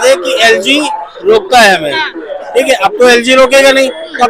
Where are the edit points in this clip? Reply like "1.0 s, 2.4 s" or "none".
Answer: none